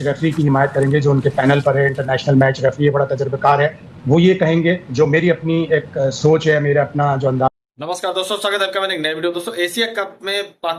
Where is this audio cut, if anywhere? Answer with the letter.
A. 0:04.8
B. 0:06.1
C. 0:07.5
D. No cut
D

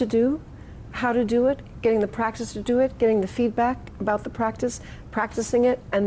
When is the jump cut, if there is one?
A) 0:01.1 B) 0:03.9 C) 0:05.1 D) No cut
D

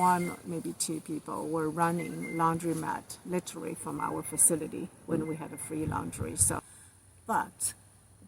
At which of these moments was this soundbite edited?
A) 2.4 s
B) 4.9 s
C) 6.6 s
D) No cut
C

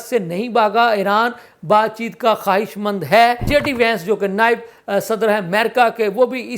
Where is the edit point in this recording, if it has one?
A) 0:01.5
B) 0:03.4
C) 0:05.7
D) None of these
B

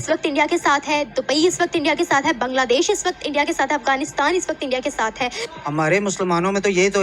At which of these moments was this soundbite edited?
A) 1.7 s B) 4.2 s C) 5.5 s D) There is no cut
D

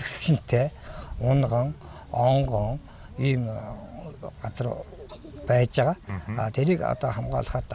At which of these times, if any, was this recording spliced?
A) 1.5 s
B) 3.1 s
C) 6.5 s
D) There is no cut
D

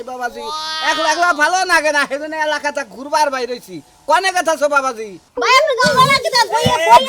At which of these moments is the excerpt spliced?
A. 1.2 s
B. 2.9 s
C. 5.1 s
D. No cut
C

